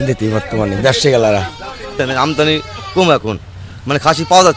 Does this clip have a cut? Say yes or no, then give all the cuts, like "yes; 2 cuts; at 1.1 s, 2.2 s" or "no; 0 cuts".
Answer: yes; 1 cut; at 1.9 s